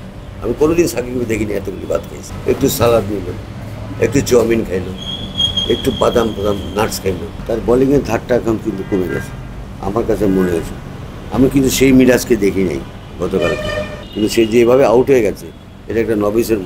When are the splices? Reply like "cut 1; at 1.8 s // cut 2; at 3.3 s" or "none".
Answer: cut 1; at 2.3 s // cut 2; at 7.3 s // cut 3; at 14.0 s